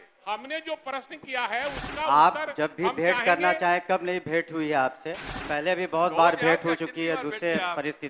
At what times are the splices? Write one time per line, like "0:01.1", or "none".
0:05.3